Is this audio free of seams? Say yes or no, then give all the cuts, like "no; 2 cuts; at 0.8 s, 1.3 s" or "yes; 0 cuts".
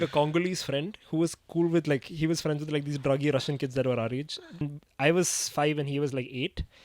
no; 1 cut; at 4.7 s